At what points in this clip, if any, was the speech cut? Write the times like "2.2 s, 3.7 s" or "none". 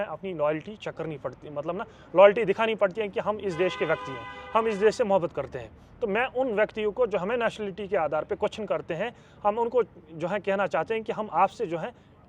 none